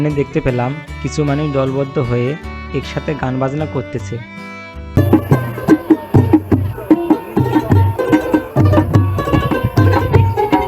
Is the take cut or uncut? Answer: uncut